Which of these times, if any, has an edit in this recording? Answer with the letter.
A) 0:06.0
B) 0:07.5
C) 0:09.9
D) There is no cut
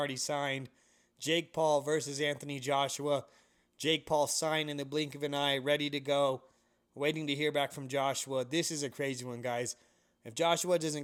D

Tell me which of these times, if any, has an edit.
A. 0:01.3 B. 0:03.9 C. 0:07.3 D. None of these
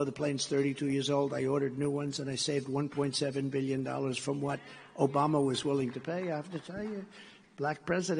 B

